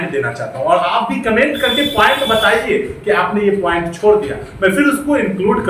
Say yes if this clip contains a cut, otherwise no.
no